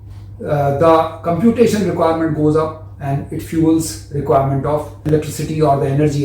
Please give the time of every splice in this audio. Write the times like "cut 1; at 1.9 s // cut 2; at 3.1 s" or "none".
cut 1; at 5.1 s

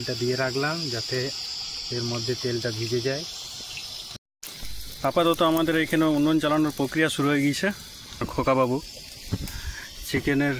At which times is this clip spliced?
cut 1; at 4.1 s // cut 2; at 8.3 s

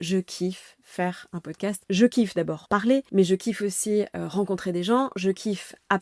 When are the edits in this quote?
cut 1; at 1.8 s // cut 2; at 2.8 s

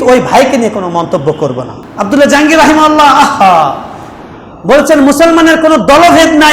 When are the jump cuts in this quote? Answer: cut 1; at 1.8 s

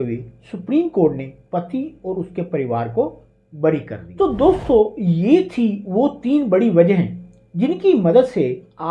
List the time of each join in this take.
cut 1; at 4.0 s

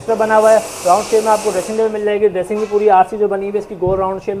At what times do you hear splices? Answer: none

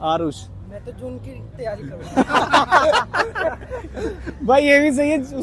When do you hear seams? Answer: none

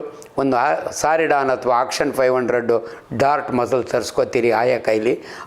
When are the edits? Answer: none

